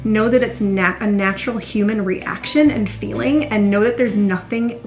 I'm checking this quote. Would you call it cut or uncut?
uncut